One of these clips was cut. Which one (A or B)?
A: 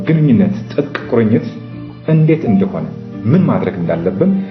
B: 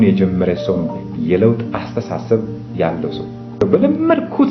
B